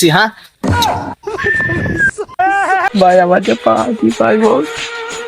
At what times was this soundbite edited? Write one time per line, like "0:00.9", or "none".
0:02.9